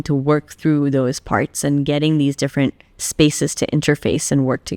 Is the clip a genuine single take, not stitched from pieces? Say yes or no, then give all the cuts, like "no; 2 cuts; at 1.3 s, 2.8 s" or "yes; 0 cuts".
yes; 0 cuts